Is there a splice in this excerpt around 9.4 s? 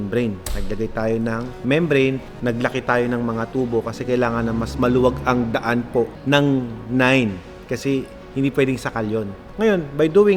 yes; 5 cuts; at 1.5 s, 2.3 s, 6.2 s, 8.2 s, 9.4 s

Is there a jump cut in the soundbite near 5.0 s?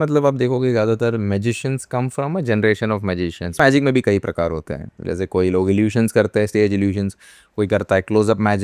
no; 1 cut; at 3.6 s

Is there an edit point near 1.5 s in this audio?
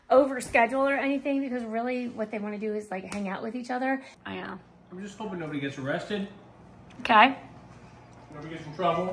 no; 1 cut; at 4.2 s

